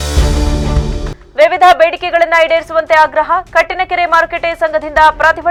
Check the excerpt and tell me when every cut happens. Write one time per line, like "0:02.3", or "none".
none